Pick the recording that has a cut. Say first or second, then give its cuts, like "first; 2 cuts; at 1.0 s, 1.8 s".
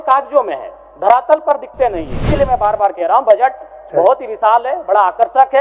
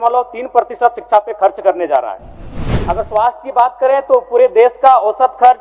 first; 1 cut; at 2.2 s